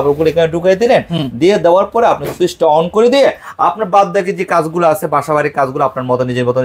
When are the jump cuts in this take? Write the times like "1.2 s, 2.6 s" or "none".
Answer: none